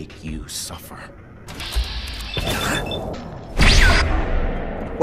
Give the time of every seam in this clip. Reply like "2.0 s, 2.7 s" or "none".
1.5 s, 3.1 s